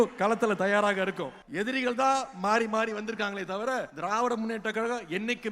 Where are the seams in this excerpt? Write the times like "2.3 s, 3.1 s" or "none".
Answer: 1.4 s, 3.9 s